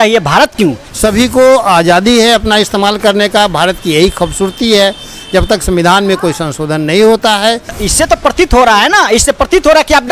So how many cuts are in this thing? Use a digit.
2